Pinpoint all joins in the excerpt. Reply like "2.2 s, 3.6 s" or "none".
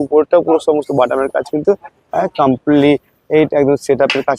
none